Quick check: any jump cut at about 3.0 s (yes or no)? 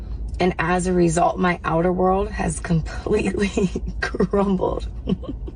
no